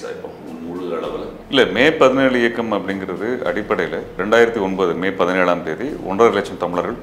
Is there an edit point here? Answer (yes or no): yes